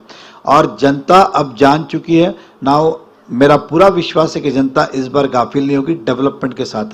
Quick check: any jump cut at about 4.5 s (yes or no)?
no